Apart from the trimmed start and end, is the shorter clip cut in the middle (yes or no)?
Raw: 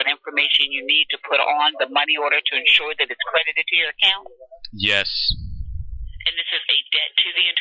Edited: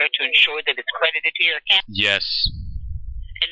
yes